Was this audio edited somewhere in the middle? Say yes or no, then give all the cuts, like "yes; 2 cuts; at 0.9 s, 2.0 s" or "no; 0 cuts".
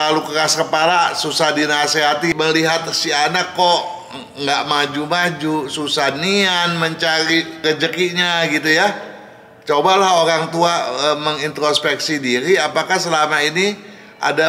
yes; 1 cut; at 2.3 s